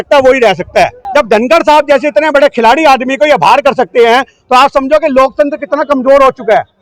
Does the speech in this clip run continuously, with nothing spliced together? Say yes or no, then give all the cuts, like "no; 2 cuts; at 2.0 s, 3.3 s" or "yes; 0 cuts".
no; 1 cut; at 1.0 s